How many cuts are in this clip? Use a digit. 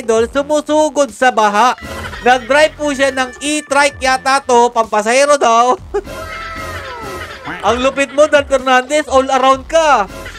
1